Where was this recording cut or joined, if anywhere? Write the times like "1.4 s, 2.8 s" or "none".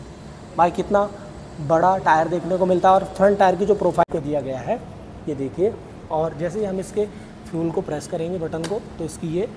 4.0 s